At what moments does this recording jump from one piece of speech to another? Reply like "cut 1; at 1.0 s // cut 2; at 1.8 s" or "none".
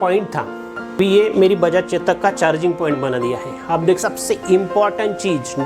cut 1; at 1.0 s // cut 2; at 4.0 s

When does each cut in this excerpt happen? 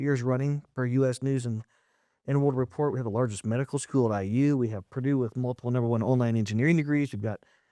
none

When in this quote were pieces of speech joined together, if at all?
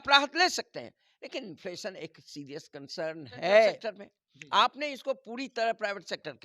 cut 1; at 3.8 s

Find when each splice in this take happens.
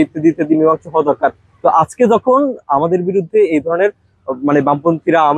none

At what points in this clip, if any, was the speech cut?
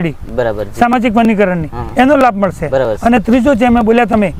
none

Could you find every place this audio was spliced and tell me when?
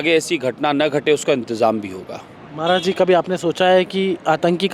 none

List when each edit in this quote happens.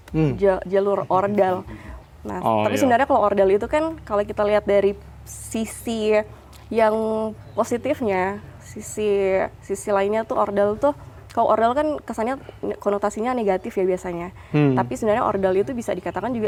none

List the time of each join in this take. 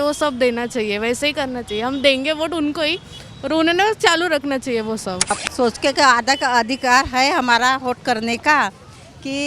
cut 1; at 5.3 s

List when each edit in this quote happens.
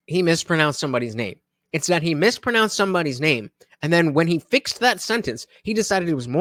none

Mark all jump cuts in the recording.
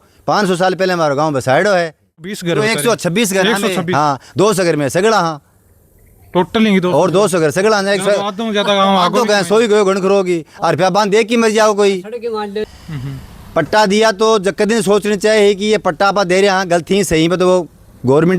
cut 1; at 2.4 s // cut 2; at 12.7 s

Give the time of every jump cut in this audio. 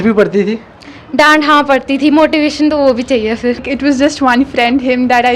cut 1; at 3.6 s

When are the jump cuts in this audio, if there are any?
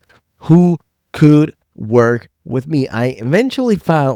none

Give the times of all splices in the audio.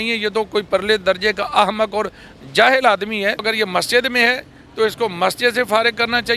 cut 1; at 3.4 s

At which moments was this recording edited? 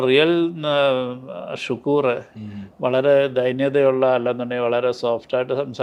none

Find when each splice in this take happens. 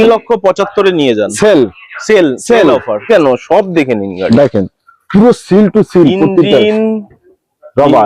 cut 1; at 3.1 s

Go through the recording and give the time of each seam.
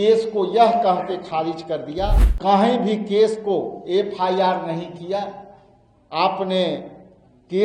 cut 1; at 2.3 s

